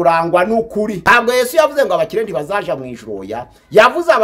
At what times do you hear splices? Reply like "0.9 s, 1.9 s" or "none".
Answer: 1.0 s